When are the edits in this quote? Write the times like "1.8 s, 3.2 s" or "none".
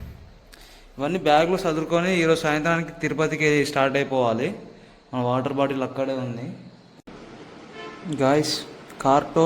7.0 s